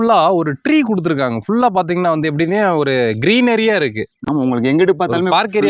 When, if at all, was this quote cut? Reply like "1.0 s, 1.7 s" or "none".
none

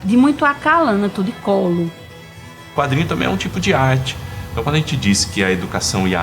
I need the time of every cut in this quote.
2.6 s

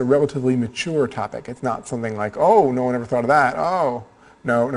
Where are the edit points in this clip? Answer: 2.9 s

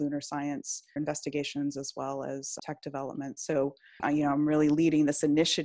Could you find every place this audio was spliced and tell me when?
1.0 s, 2.6 s, 4.0 s

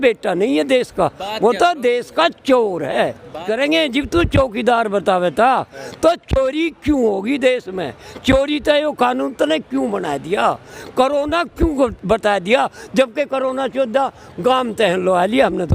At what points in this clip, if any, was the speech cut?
3.4 s

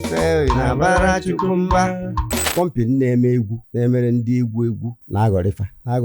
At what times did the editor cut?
2.5 s, 5.0 s

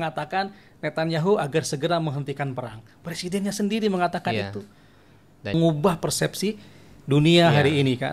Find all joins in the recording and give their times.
5.5 s

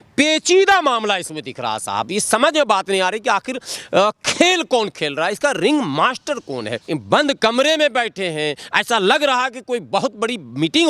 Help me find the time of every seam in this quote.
6.8 s

